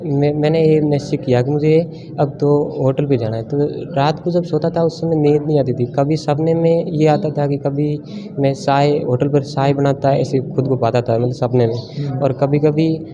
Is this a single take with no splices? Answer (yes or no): yes